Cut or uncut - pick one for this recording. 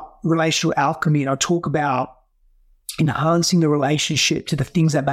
uncut